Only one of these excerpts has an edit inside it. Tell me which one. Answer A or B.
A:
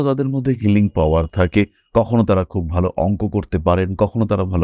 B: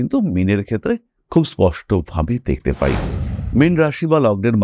B